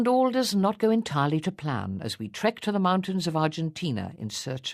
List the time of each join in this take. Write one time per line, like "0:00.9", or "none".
0:01.1